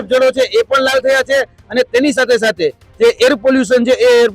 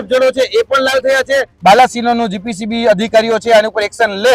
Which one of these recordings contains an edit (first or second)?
second